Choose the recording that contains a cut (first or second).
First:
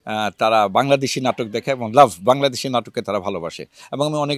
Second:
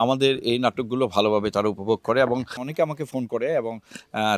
second